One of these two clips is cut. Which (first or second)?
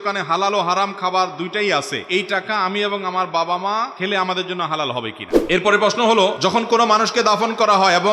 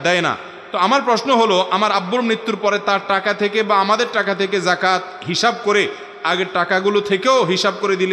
first